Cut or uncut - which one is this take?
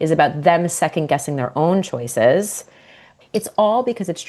cut